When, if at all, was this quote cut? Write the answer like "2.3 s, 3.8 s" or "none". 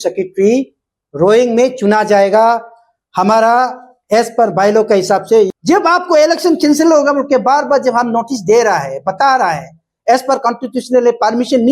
5.5 s